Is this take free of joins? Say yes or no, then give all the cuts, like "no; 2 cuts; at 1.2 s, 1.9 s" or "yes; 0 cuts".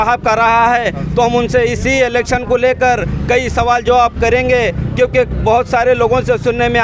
yes; 0 cuts